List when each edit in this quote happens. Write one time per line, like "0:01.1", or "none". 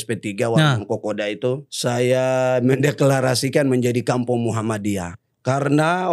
0:01.7
0:05.1